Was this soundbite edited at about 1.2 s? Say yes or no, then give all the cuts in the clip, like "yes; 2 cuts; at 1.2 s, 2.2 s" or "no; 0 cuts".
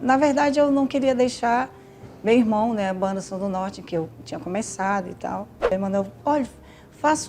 no; 1 cut; at 5.7 s